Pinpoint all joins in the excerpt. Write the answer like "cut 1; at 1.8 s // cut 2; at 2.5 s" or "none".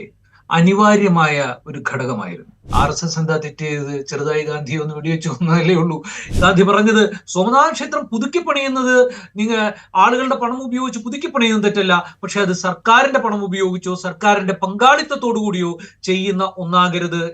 cut 1; at 2.7 s // cut 2; at 6.2 s